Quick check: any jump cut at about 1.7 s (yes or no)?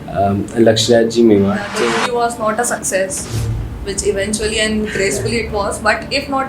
yes